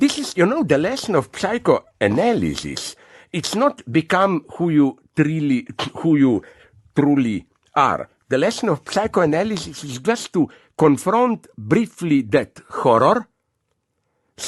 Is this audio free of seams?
yes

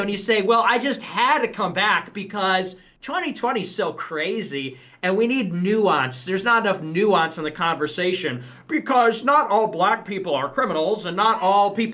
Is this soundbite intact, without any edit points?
yes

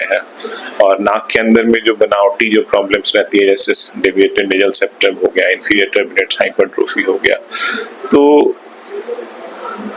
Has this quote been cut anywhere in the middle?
no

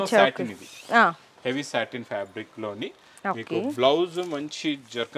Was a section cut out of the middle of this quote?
no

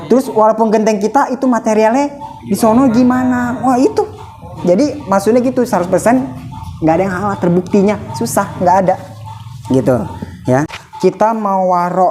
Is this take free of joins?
no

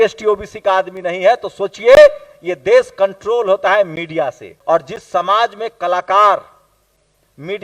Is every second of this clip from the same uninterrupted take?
no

